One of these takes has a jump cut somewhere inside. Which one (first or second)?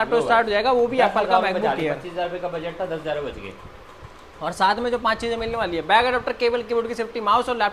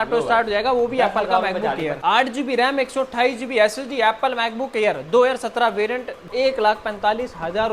second